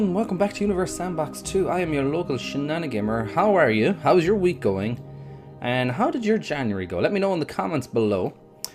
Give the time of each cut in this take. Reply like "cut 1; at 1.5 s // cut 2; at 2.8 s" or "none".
cut 1; at 2.8 s